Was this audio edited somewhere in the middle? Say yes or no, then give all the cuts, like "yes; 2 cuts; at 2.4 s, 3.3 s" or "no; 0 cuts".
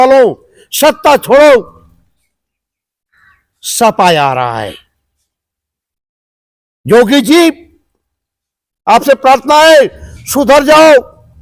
no; 0 cuts